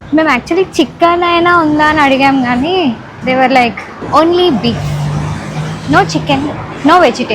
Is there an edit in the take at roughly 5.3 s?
no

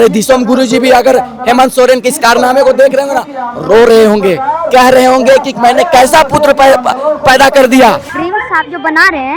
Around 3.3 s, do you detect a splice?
no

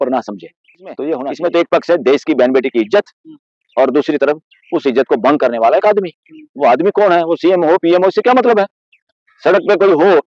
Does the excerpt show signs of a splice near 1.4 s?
yes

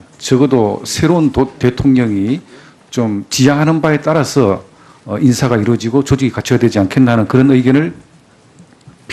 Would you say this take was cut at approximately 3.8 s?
no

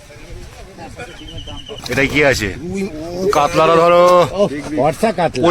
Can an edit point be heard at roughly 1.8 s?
yes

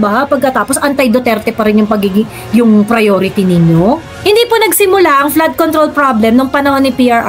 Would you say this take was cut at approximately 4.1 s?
no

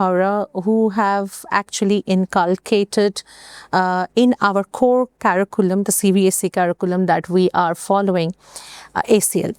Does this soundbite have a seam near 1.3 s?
no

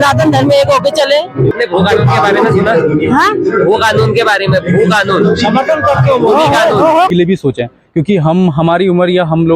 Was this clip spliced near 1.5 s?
yes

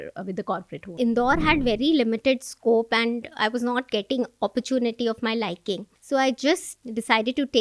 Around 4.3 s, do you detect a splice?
no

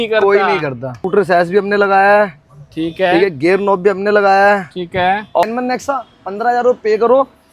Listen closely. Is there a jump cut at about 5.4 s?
yes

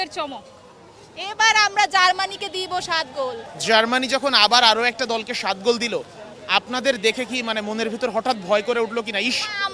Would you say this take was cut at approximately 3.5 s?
yes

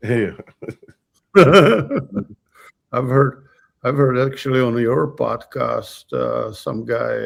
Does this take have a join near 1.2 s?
no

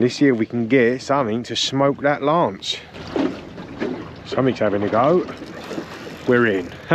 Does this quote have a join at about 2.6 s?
yes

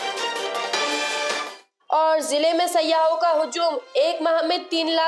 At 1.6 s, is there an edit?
yes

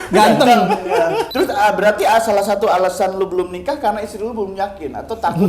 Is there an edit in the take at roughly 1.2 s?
yes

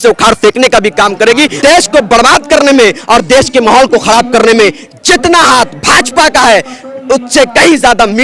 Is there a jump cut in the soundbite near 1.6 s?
yes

